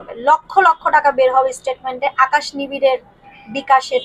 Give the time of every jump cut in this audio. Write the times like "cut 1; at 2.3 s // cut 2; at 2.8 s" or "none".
none